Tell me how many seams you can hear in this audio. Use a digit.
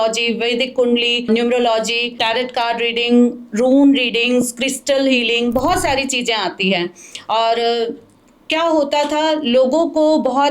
2